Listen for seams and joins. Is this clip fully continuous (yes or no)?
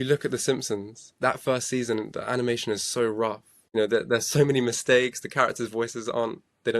no